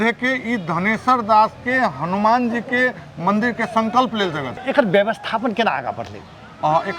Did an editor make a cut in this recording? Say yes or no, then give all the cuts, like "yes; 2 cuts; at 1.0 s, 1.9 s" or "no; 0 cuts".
yes; 1 cut; at 4.5 s